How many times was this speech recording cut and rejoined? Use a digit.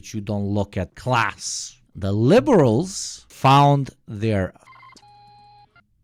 1